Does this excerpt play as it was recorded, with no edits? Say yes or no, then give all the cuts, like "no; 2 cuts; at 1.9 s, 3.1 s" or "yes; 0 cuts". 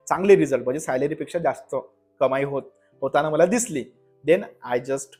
yes; 0 cuts